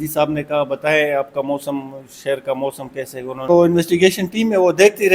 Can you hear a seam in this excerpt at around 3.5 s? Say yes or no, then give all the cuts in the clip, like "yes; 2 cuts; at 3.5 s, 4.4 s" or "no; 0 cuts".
yes; 1 cut; at 3.5 s